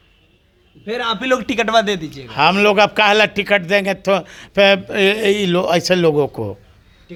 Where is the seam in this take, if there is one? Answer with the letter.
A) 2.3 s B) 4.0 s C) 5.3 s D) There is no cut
D